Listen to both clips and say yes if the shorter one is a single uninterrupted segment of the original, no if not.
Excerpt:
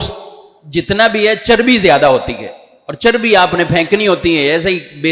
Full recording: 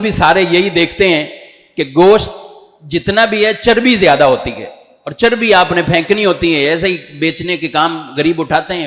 yes